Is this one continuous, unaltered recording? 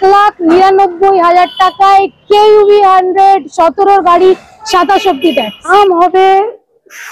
no; 1 cut; at 5.7 s

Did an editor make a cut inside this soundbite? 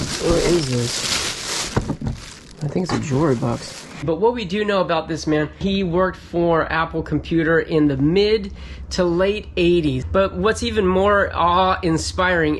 yes; 3 cuts; at 1.7 s, 4.0 s, 10.0 s

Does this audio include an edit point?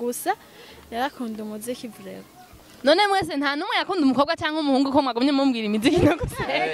no; 0 cuts

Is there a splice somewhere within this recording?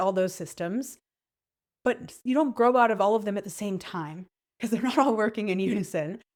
no; 0 cuts

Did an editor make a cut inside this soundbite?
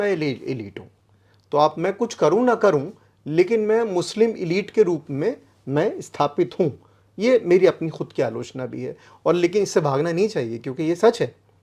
no; 0 cuts

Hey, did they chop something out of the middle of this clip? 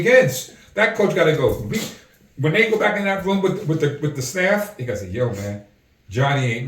no; 0 cuts

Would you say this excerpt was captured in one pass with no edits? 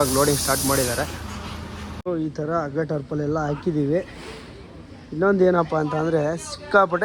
no; 1 cut; at 2.1 s

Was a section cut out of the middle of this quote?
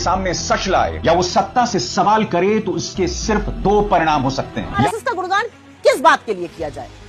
yes; 1 cut; at 4.8 s

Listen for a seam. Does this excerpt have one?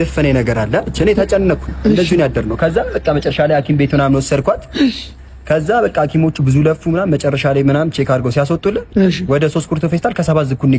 no; 0 cuts

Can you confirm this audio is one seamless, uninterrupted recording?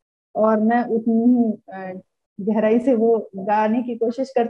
yes; 0 cuts

